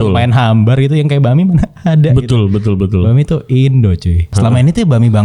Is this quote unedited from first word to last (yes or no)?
no